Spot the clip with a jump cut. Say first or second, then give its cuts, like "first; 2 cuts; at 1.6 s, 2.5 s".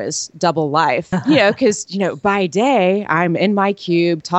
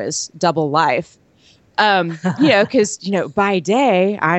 first; 1 cut; at 1.1 s